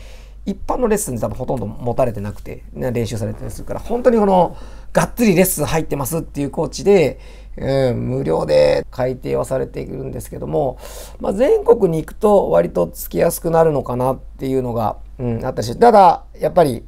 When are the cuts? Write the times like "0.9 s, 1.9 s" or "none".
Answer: 8.9 s